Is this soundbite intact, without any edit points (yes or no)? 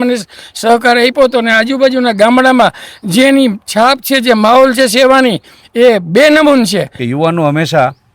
no